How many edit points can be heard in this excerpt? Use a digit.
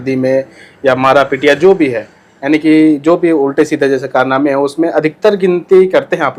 0